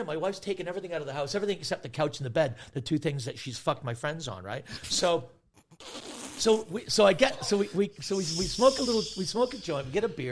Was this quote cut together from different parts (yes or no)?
no